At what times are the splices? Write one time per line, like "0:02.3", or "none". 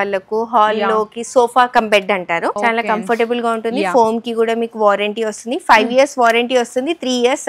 0:02.6

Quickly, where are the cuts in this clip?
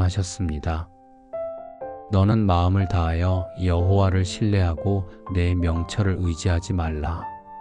0:01.0
0:02.0

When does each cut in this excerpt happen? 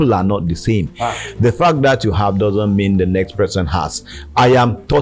none

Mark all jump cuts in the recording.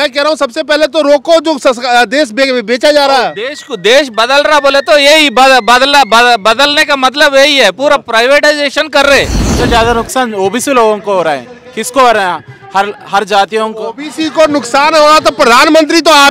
0:09.6

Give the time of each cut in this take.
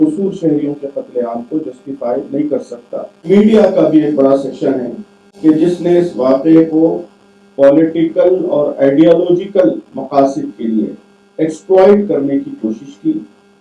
0:03.3

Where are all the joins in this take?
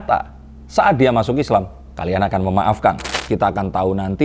0:03.1

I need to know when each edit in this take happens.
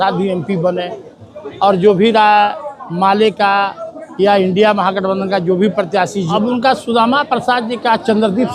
0:06.3

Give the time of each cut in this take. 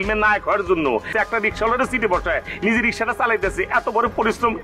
0:01.1

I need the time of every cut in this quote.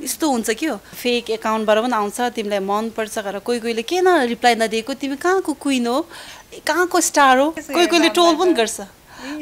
0:00.9
0:07.6

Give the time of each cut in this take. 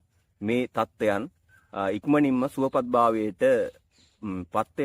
none

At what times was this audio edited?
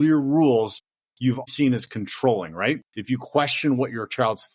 0:01.5
0:02.9

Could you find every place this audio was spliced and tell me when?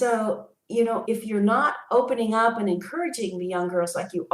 0:01.0

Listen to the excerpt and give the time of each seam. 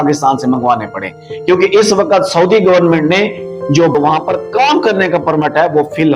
0:03.9

